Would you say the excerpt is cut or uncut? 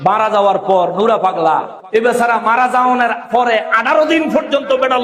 uncut